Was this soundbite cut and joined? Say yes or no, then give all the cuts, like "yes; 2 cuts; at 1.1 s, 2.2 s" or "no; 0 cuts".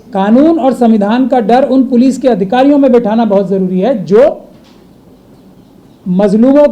no; 0 cuts